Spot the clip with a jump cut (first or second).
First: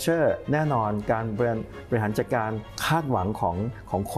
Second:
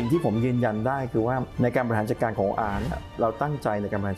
second